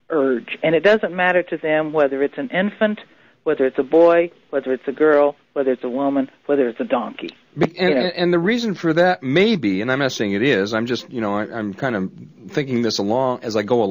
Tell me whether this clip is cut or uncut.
cut